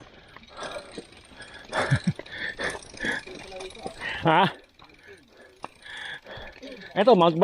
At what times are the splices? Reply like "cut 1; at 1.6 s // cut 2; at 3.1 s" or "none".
none